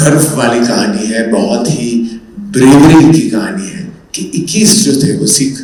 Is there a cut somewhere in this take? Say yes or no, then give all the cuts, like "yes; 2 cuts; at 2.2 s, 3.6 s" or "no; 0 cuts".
no; 0 cuts